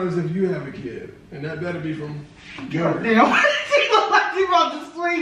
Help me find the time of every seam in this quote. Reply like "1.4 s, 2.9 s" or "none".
none

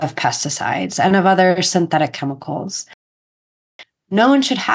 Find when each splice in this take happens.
3.4 s

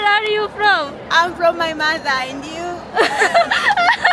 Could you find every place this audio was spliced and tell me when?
none

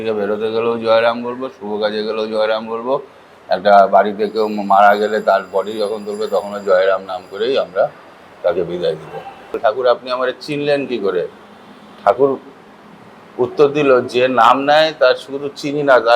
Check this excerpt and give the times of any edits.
9.6 s

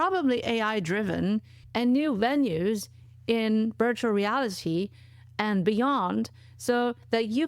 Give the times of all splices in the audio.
1.6 s

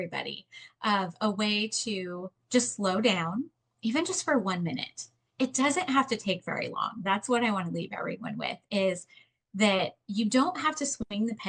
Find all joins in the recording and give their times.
none

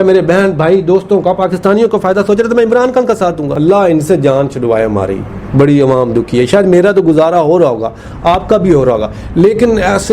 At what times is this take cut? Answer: 3.5 s

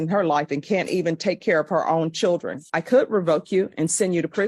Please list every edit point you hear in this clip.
2.7 s

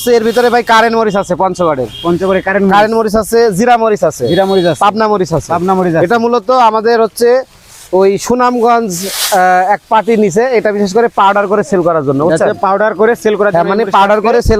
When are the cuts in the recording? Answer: none

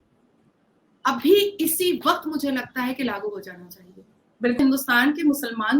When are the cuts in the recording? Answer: 4.6 s

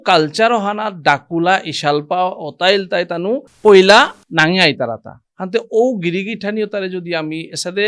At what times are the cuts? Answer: 3.5 s

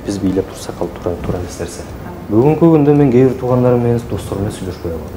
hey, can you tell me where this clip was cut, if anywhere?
2.1 s

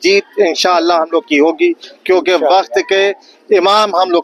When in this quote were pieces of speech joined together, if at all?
none

